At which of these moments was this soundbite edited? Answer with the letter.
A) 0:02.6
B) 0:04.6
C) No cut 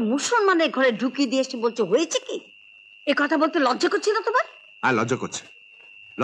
C